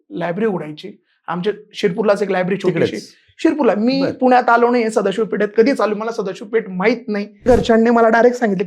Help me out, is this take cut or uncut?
cut